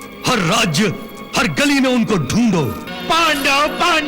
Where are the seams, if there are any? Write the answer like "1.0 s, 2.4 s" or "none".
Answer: 2.9 s